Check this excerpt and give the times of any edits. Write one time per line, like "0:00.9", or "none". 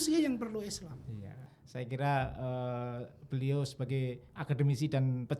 0:01.6